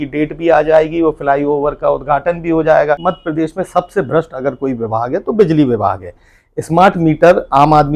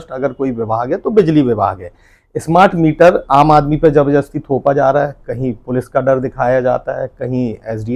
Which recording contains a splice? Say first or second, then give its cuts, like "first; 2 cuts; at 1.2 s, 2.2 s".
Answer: first; 1 cut; at 3.1 s